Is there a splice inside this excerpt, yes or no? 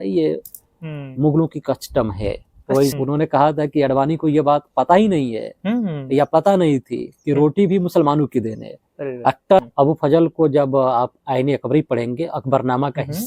yes